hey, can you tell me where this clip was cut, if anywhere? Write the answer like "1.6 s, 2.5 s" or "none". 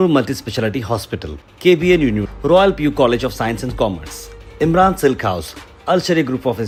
none